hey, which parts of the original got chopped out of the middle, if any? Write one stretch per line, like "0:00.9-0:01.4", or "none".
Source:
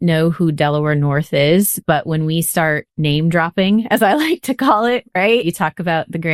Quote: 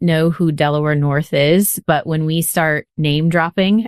none